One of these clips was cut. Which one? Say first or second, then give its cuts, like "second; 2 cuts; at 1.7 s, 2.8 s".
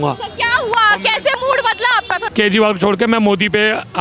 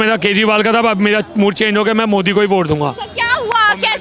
first; 1 cut; at 2.2 s